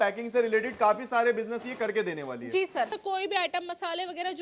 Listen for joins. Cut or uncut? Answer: cut